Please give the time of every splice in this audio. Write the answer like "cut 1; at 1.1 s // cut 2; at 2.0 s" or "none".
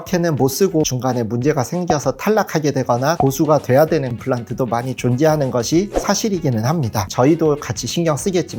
cut 1; at 7.1 s